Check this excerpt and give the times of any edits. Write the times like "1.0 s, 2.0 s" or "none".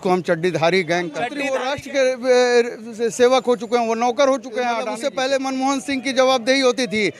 1.4 s, 5.0 s